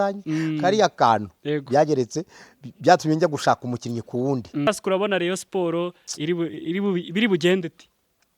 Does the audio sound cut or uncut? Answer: cut